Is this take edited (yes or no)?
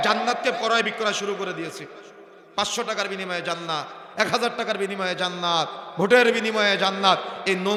no